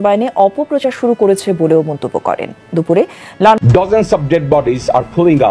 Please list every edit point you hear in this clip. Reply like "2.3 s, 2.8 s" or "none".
3.6 s